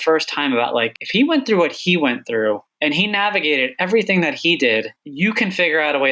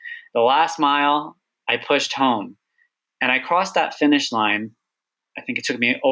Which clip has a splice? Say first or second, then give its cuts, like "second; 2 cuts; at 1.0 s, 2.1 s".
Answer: first; 3 cuts; at 1.0 s, 2.7 s, 5.0 s